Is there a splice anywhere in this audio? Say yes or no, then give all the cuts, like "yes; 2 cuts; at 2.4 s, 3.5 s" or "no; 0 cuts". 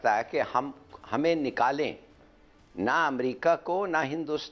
no; 0 cuts